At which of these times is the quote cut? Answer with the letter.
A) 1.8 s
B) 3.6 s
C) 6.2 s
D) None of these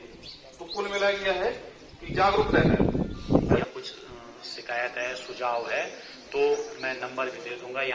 B